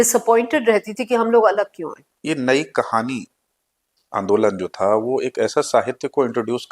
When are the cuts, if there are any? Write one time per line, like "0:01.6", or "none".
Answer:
0:02.0